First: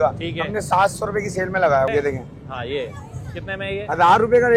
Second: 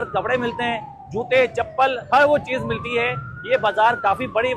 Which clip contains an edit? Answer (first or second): first